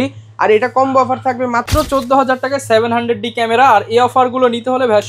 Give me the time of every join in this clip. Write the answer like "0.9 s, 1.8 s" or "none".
1.7 s